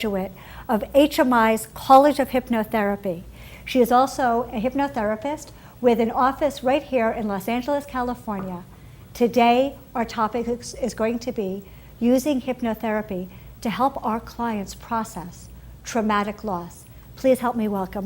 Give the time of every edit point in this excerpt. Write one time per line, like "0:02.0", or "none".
0:06.6